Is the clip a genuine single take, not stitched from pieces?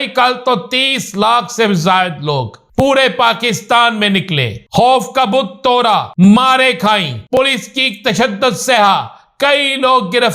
no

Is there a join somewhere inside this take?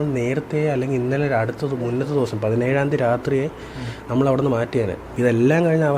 yes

